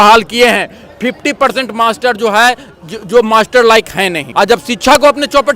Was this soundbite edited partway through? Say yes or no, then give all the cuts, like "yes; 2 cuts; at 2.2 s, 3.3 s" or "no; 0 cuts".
yes; 1 cut; at 4.2 s